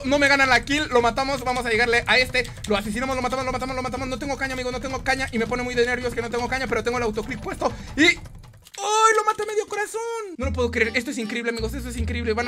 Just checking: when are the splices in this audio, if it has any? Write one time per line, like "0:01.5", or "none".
none